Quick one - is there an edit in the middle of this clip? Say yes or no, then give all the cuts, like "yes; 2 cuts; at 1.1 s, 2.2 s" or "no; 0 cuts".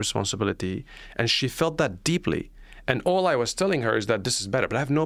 no; 0 cuts